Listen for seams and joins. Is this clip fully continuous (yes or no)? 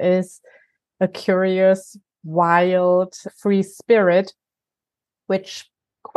yes